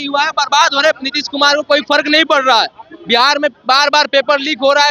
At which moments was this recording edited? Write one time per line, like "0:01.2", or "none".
none